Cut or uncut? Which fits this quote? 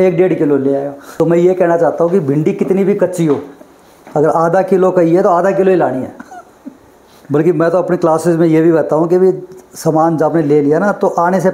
cut